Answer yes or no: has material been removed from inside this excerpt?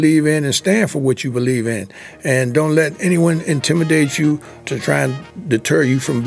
no